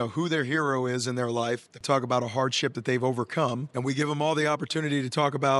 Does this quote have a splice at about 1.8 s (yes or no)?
yes